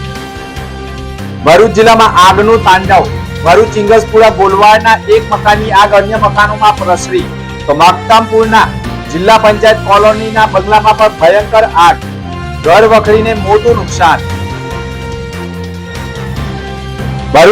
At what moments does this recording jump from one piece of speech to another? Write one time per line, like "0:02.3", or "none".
0:01.4